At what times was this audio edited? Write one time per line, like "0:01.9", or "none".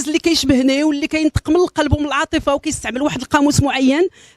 0:02.8